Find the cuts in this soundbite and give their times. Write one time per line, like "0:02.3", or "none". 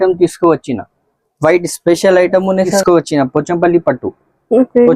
0:02.8